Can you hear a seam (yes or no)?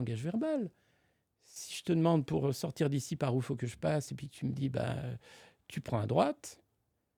no